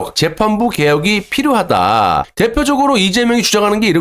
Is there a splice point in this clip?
yes; 1 cut; at 2.3 s

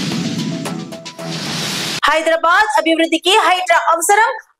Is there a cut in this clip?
yes; 1 cut; at 1.9 s

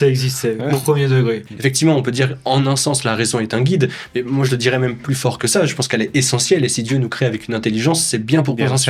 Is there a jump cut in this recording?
yes; 1 cut; at 1.4 s

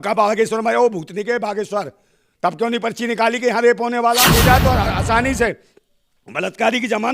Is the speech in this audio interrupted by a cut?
yes; 1 cut; at 4.3 s

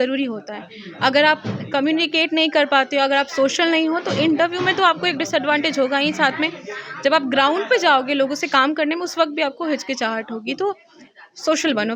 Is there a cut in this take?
no; 0 cuts

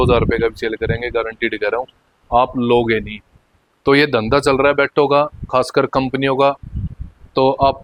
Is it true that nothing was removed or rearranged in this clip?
yes; 0 cuts

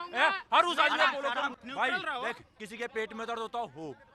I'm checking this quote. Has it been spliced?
yes; 1 cut; at 1.5 s

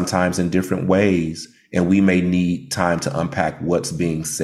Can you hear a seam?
no; 0 cuts

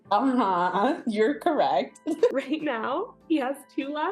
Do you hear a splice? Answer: yes; 1 cut; at 2.3 s

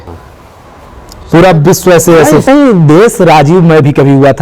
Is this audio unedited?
no; 1 cut; at 2.4 s

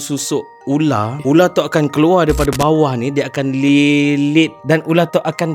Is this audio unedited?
no; 2 cuts; at 1.2 s, 4.6 s

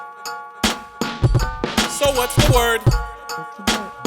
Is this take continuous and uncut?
no; 1 cut; at 2.8 s

